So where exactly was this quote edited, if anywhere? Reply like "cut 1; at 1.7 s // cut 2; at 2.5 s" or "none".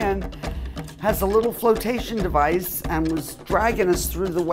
none